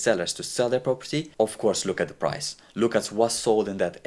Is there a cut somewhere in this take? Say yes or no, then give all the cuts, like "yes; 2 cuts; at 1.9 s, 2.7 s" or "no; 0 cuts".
yes; 1 cut; at 1.3 s